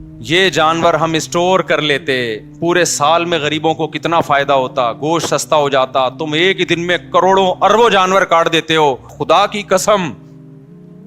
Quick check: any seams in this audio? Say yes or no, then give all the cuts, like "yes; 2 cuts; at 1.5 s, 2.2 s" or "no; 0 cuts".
yes; 1 cut; at 9.2 s